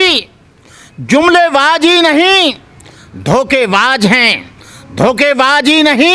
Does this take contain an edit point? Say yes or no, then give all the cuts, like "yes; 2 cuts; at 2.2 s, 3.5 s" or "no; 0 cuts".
no; 0 cuts